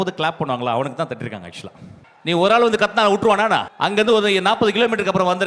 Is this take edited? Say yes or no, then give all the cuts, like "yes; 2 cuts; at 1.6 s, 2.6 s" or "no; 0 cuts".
yes; 2 cuts; at 2.1 s, 3.7 s